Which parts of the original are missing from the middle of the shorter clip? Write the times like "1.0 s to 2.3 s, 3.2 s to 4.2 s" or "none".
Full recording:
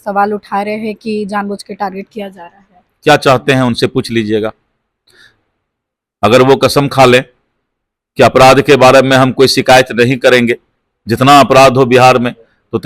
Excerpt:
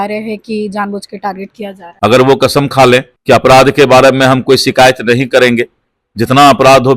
2.4 s to 6.0 s, 7.3 s to 8.0 s